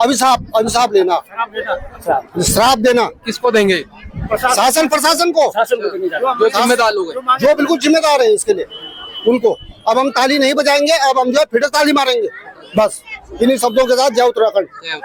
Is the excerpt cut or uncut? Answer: uncut